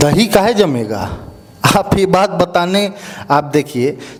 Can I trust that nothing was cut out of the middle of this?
yes; 0 cuts

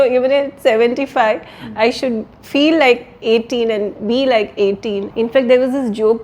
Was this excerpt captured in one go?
no; 1 cut; at 5.1 s

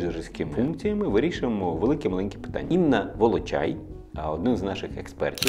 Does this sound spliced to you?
no; 0 cuts

